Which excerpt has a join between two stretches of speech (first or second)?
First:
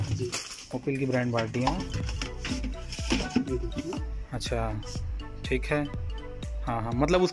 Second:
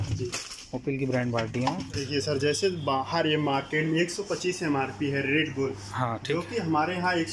second